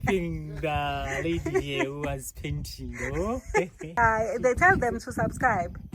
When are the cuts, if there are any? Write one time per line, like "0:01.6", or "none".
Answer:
0:04.0